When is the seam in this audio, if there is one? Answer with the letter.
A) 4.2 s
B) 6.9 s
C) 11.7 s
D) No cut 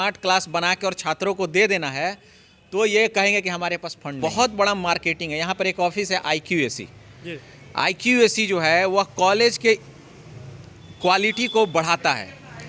A